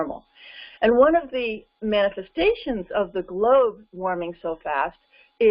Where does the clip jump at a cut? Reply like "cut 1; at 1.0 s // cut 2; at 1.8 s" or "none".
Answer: none